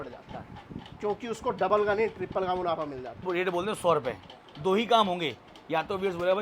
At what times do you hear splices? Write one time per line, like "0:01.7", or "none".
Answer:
0:03.1